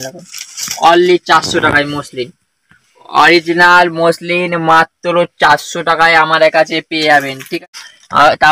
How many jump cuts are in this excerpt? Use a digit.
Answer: 1